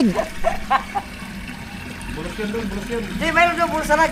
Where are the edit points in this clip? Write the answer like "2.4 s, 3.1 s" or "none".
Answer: none

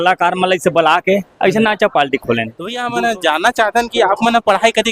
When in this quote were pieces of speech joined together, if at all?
2.8 s

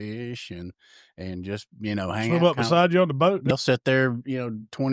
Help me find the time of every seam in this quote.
3.5 s

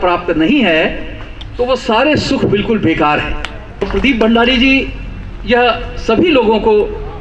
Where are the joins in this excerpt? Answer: 3.8 s

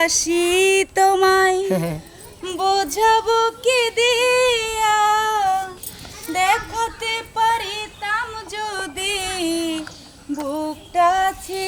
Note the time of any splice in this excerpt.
none

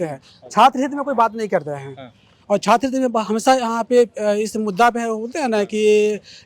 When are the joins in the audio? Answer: none

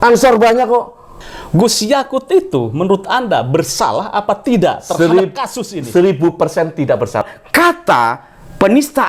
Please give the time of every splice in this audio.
1.2 s, 7.4 s

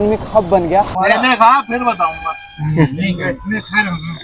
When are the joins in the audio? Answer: 0.9 s

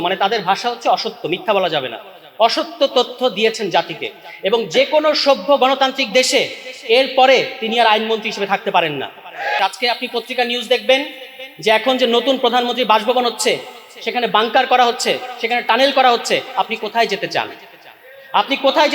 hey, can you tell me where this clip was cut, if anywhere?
9.6 s

